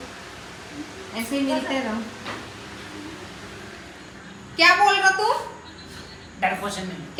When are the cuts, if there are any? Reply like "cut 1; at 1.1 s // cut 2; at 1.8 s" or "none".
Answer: none